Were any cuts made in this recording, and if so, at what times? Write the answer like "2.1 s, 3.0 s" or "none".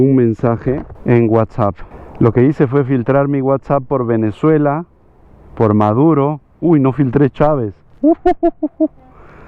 none